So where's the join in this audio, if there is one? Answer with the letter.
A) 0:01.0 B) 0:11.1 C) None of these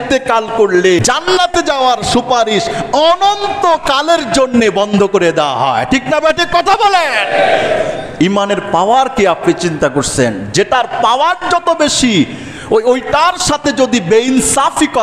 A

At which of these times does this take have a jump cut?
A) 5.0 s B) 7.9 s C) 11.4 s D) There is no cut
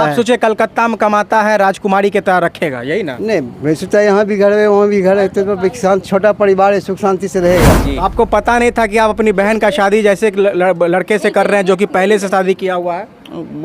B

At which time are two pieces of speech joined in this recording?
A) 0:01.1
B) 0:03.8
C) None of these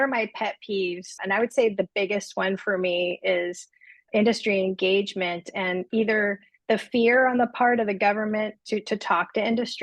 A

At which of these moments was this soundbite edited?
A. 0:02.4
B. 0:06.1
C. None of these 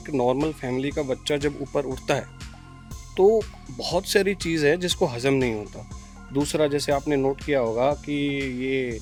C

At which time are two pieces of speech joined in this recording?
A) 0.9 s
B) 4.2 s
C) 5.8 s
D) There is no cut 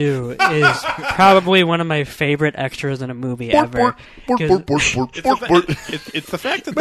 D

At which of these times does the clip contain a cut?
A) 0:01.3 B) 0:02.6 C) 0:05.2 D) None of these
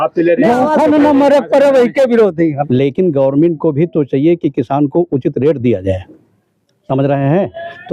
B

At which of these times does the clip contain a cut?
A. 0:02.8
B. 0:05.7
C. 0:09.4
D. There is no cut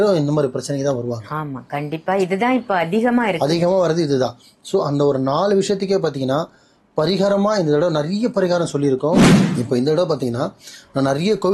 C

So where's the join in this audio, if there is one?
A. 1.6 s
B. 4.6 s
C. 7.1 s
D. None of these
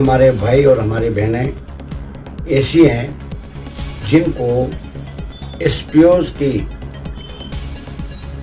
D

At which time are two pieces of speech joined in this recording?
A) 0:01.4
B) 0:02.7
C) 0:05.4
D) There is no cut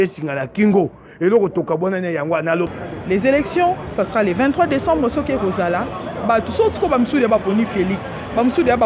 B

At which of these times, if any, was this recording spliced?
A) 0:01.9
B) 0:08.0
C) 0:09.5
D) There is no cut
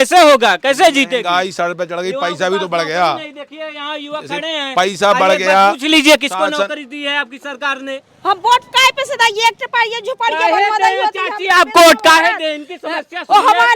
B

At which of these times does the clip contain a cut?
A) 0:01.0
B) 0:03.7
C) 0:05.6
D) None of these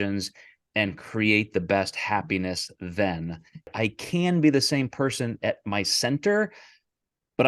B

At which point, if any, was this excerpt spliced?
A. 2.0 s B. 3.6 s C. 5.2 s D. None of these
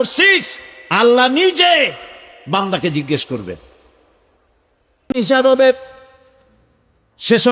C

